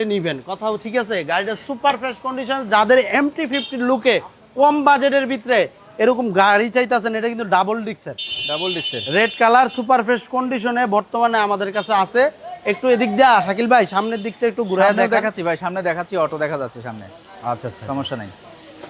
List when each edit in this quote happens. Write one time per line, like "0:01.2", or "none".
none